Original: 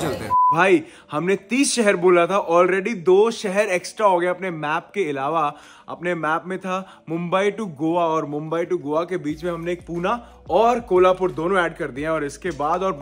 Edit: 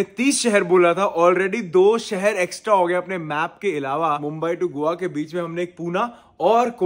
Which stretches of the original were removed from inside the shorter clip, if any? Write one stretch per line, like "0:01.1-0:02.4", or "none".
0:05.5-0:08.3